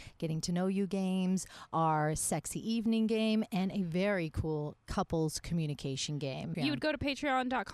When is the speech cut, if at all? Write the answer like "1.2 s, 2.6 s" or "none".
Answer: 6.5 s